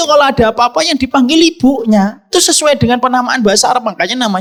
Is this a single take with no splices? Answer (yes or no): yes